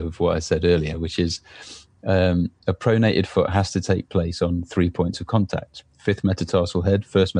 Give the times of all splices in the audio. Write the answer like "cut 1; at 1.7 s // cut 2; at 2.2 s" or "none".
none